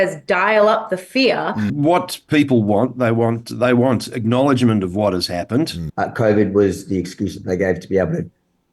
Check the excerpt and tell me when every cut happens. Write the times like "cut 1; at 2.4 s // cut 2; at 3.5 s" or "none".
cut 1; at 1.7 s // cut 2; at 5.8 s